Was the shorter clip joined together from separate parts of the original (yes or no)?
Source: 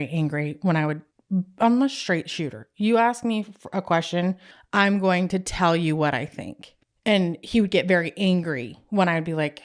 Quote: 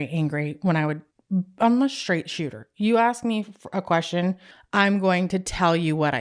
no